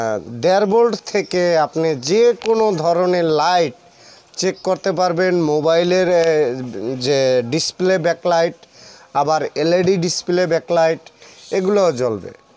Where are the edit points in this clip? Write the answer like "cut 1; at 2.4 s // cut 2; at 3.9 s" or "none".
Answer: cut 1; at 9.9 s